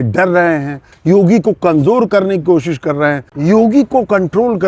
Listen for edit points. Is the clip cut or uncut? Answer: cut